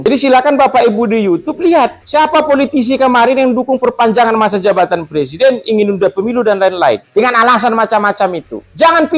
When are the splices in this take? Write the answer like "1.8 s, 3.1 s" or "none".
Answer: none